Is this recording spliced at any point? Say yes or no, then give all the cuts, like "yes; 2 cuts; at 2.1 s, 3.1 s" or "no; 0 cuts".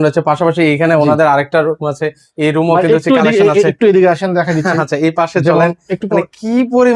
no; 0 cuts